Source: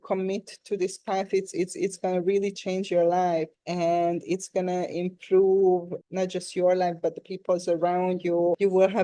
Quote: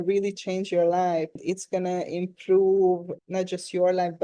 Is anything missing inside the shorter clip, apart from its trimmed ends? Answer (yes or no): yes